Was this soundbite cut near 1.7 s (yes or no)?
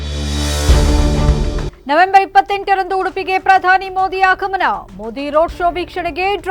yes